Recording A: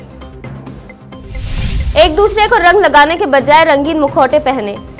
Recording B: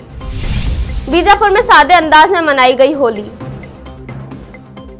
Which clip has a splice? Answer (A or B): A